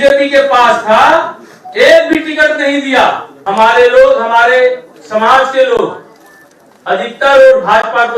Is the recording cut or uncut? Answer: cut